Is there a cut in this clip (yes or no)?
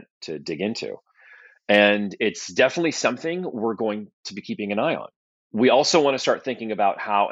no